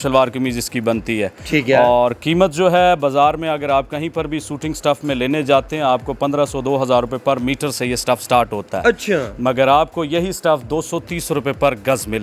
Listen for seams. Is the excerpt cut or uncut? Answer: uncut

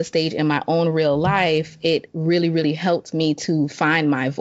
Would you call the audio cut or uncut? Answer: uncut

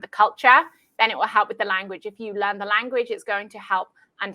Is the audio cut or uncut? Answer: uncut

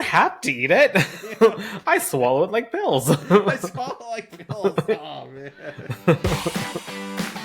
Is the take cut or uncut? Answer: cut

